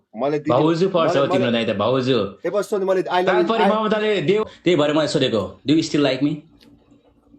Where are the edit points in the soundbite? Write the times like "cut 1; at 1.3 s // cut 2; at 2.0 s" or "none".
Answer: cut 1; at 4.4 s